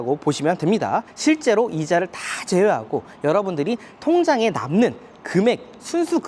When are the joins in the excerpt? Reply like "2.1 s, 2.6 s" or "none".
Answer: 1.1 s